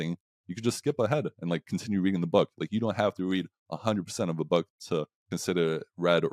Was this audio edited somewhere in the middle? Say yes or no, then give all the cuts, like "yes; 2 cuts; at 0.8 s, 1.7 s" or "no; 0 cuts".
no; 0 cuts